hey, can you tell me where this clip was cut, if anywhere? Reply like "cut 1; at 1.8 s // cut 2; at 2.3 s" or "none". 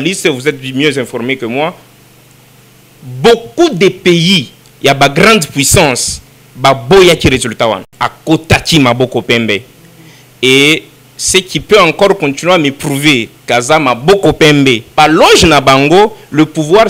cut 1; at 7.8 s // cut 2; at 14.9 s